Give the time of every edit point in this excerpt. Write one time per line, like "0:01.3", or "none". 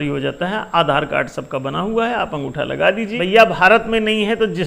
0:03.1